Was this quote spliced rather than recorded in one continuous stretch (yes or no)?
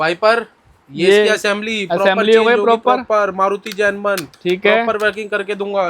no